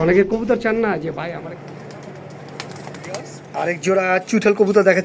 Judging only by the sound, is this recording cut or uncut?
cut